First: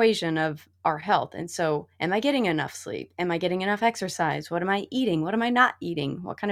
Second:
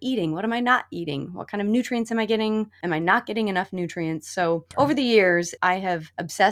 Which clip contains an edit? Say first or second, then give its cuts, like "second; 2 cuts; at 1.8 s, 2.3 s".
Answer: second; 3 cuts; at 2.8 s, 4.7 s, 5.6 s